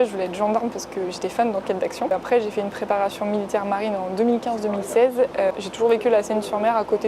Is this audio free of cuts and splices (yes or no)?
yes